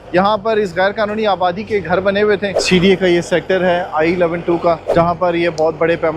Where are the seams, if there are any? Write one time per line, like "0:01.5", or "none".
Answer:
0:02.5
0:04.8